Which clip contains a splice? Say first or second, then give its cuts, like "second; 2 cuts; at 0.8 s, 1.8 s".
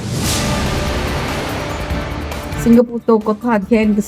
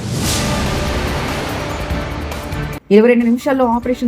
second; 1 cut; at 2.6 s